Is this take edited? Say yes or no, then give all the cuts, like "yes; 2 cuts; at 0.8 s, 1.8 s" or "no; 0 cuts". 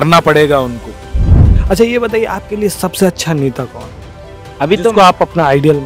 yes; 1 cut; at 1.4 s